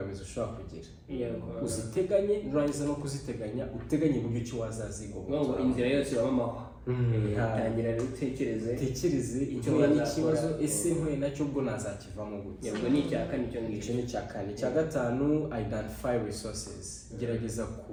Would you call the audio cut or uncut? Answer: uncut